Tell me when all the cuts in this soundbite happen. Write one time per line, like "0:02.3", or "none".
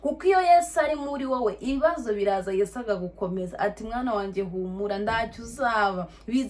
none